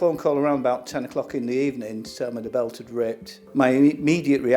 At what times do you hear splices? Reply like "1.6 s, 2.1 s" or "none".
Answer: none